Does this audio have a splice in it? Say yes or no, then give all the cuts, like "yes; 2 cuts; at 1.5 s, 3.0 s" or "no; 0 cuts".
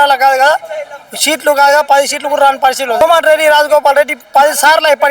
yes; 1 cut; at 3.0 s